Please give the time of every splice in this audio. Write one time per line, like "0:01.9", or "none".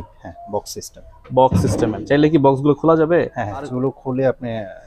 0:03.7